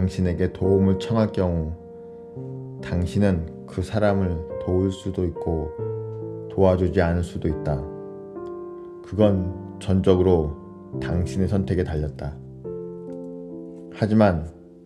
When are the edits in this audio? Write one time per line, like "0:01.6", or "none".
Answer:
0:07.8
0:09.1